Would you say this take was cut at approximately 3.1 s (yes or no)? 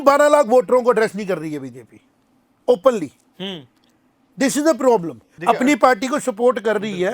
no